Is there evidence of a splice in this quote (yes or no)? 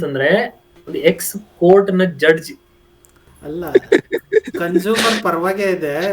yes